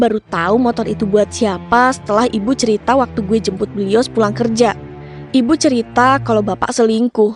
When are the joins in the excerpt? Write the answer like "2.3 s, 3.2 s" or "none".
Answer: none